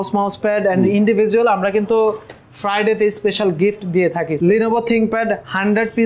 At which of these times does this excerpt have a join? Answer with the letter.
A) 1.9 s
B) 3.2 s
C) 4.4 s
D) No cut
C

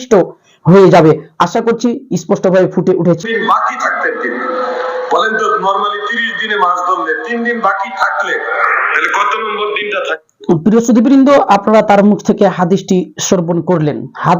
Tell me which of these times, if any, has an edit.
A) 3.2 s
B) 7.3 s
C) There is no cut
A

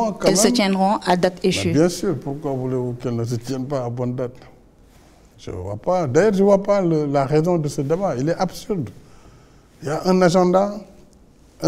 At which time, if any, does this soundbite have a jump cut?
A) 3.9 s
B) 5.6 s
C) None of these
C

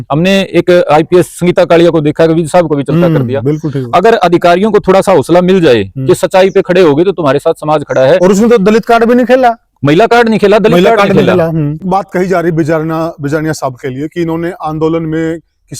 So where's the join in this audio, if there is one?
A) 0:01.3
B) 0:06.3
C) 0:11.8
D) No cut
C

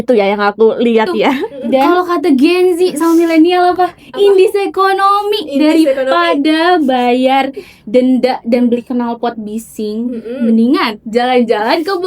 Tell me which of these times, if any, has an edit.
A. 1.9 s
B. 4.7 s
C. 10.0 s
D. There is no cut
A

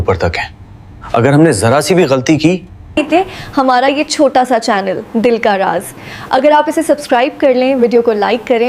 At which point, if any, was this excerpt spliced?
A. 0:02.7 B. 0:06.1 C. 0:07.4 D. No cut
A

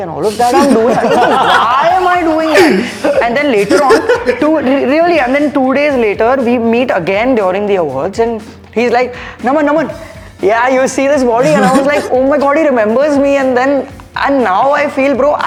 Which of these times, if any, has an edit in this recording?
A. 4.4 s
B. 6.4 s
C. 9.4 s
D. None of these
D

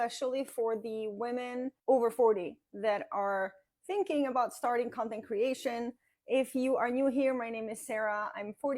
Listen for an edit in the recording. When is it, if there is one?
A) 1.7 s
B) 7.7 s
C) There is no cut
A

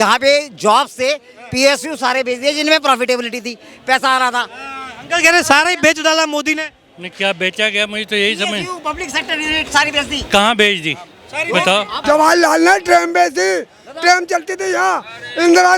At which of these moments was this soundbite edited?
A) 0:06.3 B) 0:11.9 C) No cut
B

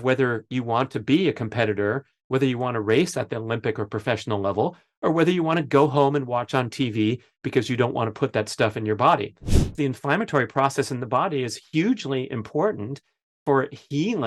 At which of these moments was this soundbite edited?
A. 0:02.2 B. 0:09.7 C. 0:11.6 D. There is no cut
B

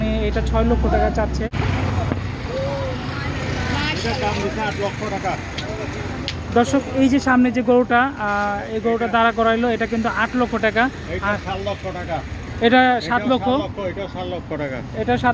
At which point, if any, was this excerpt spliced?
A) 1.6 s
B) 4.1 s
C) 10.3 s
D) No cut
A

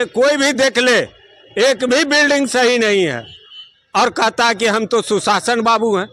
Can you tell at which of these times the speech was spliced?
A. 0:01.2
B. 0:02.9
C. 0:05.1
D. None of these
D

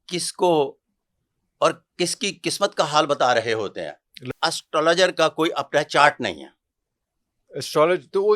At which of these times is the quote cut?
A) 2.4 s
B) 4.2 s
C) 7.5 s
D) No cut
B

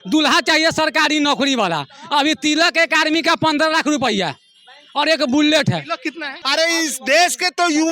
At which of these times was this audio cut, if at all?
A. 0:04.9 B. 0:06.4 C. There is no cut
B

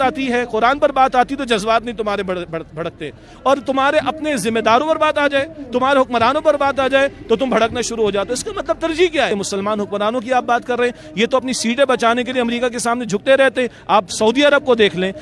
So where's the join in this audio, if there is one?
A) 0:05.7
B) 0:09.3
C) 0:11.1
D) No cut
B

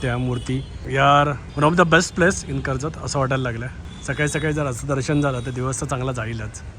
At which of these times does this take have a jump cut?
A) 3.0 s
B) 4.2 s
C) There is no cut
C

